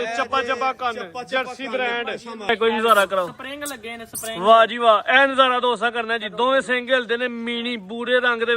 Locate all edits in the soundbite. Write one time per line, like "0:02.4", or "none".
0:02.5